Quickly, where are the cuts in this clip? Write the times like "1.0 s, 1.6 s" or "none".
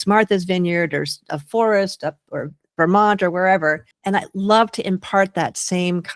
3.9 s

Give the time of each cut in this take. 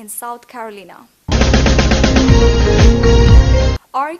none

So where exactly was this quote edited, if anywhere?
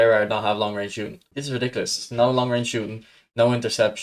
1.1 s

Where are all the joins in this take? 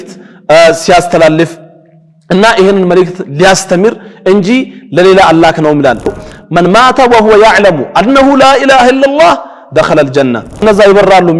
6.1 s, 10.6 s

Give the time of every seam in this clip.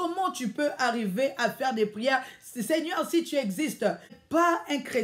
4.1 s

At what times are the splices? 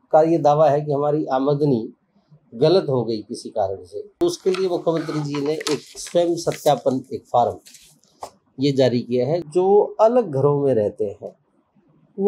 4.2 s, 9.4 s

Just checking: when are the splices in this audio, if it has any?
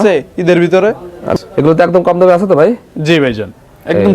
1.2 s

